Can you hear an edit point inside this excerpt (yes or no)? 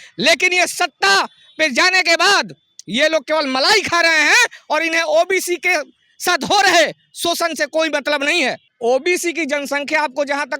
no